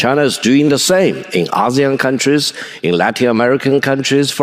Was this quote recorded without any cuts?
yes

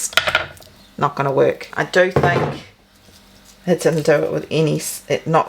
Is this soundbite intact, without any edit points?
no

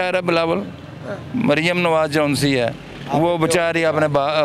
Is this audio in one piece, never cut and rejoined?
yes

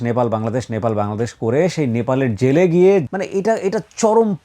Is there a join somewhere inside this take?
yes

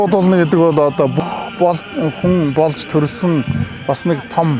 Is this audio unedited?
no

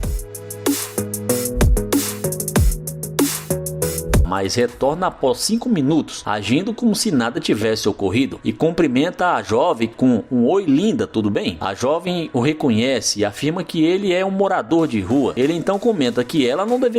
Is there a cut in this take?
yes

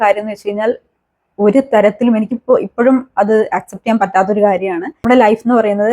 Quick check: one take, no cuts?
no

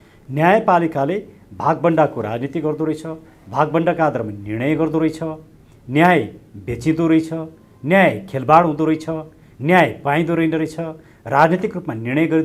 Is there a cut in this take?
no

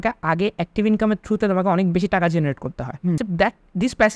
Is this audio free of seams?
no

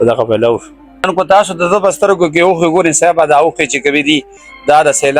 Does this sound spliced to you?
yes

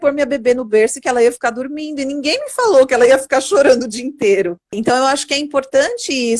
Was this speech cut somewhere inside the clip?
yes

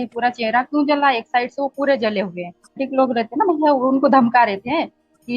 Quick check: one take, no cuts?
no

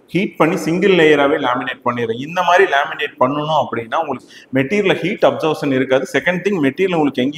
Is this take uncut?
yes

